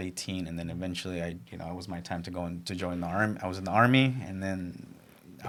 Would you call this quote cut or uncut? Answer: uncut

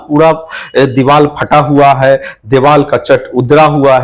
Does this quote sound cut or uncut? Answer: uncut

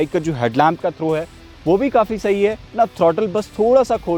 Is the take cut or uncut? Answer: cut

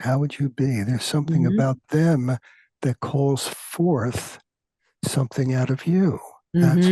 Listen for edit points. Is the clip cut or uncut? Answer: uncut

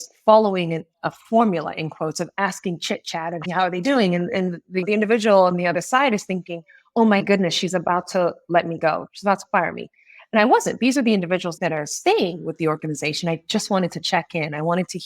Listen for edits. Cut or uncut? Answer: cut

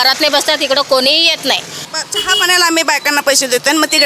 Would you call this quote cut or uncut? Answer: cut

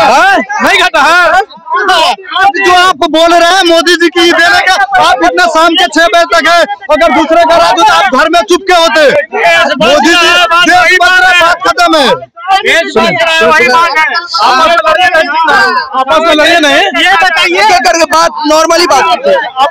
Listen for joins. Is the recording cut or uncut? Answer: uncut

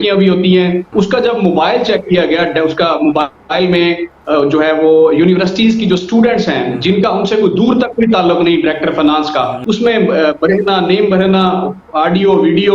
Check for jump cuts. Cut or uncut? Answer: cut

